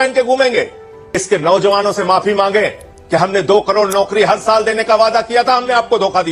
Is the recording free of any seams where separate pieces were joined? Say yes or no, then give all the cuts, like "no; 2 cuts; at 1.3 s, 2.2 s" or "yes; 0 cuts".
no; 1 cut; at 1.2 s